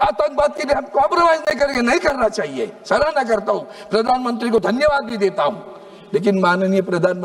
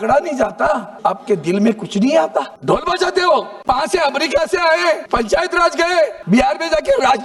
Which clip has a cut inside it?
second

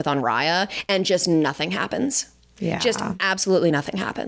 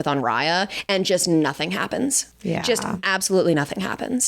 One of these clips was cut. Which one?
second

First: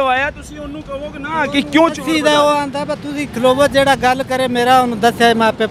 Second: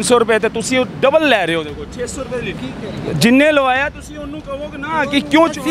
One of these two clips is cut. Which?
second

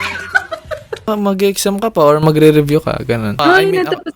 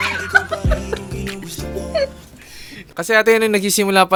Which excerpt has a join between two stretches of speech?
first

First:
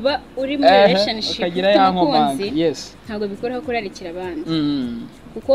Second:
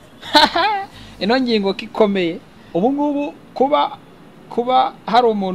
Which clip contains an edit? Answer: second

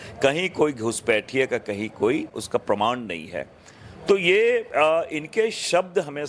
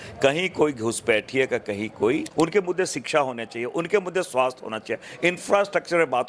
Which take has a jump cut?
second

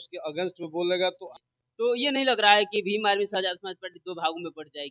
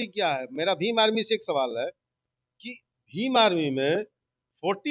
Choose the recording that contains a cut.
first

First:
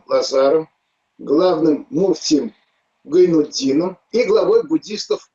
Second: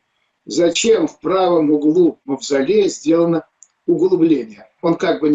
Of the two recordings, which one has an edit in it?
first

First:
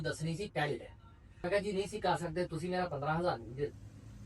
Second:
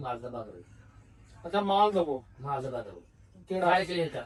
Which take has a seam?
first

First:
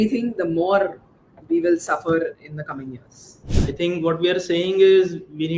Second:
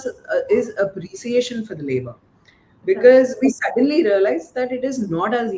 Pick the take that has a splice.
first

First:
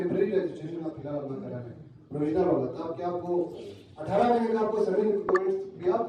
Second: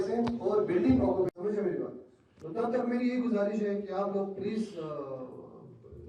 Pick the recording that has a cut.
second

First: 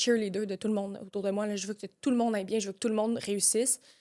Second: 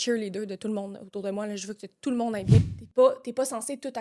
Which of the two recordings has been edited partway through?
second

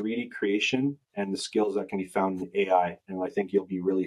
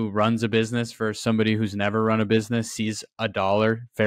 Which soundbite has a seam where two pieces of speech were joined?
first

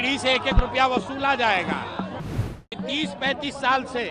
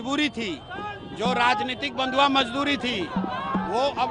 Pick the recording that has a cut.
first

